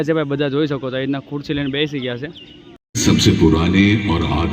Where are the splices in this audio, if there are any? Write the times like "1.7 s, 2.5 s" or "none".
2.9 s